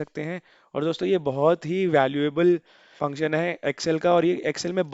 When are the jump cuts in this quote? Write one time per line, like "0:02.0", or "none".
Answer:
0:02.9